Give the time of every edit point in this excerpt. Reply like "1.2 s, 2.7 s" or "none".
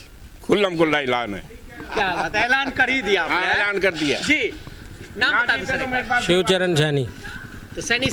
none